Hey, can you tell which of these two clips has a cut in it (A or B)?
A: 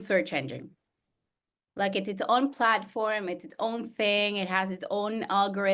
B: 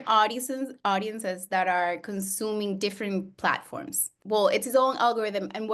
B